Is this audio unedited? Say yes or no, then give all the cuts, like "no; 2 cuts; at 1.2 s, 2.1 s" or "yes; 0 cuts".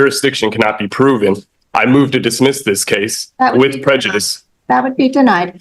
yes; 0 cuts